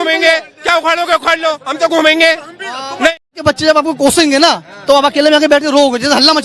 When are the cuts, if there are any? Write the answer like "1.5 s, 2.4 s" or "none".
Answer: 3.3 s